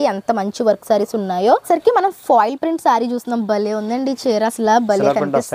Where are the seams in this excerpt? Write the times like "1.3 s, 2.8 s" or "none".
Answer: 1.7 s